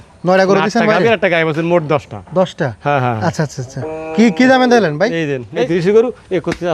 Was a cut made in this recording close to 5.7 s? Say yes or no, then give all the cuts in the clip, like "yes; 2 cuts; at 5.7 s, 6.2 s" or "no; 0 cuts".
yes; 1 cut; at 5.7 s